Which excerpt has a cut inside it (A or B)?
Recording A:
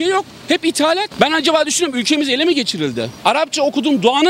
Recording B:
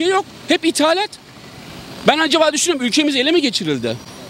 A